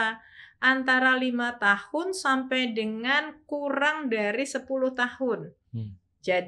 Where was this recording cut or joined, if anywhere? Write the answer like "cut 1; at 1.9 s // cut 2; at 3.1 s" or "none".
none